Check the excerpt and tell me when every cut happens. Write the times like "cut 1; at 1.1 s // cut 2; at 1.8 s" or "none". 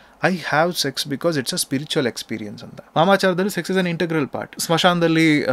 cut 1; at 2.9 s // cut 2; at 4.5 s

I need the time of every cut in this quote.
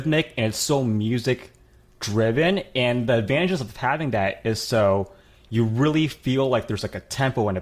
none

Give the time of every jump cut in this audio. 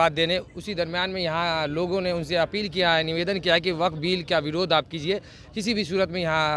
none

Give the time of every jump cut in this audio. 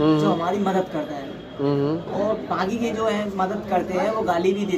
none

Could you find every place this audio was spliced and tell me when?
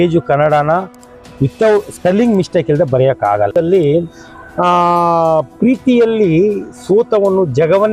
cut 1; at 3.5 s

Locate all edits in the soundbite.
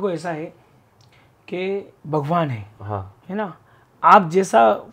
cut 1; at 2.0 s // cut 2; at 3.1 s

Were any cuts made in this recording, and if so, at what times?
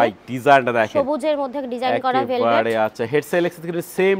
none

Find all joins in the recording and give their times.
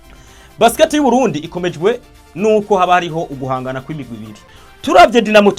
cut 1; at 4.4 s

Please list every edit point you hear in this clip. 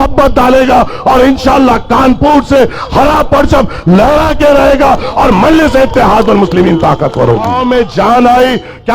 cut 1; at 7.5 s

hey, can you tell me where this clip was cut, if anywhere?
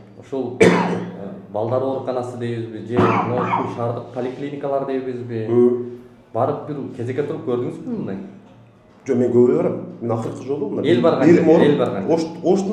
none

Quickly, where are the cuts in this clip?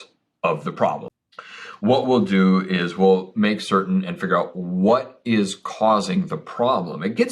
cut 1; at 1.1 s

